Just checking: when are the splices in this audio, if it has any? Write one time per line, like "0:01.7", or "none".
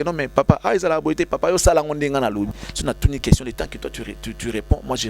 0:02.6